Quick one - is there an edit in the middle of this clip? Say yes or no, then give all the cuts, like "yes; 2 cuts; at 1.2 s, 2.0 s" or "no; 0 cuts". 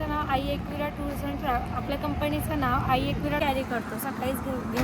yes; 1 cut; at 3.4 s